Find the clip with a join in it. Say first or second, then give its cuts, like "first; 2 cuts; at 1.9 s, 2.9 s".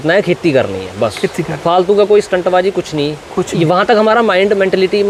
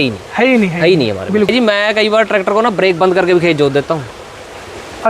second; 1 cut; at 1.5 s